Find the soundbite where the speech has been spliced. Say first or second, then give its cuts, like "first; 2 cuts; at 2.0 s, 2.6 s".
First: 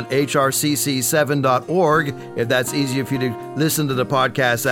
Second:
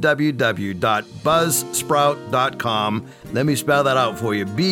second; 1 cut; at 3.2 s